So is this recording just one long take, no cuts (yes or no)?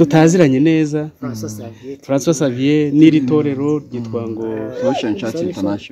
yes